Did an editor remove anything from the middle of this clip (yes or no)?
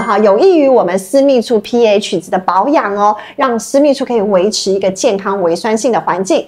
no